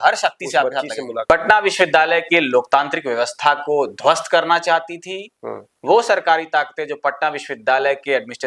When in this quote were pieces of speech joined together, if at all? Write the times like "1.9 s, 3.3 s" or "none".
1.2 s